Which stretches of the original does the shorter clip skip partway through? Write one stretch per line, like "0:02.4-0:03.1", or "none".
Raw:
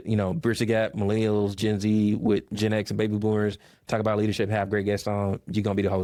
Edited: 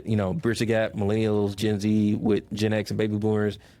none